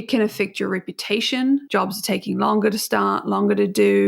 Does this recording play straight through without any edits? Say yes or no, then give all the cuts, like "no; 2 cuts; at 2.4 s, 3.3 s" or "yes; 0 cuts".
no; 1 cut; at 1.6 s